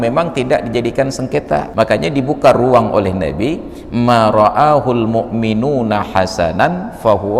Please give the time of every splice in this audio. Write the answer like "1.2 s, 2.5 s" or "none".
1.7 s